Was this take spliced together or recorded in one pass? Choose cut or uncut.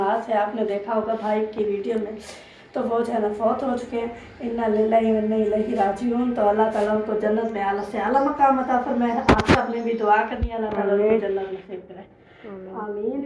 uncut